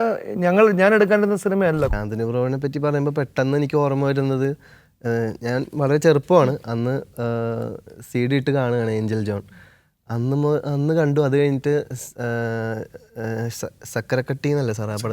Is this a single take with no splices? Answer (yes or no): no